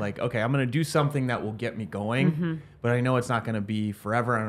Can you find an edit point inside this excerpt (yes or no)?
no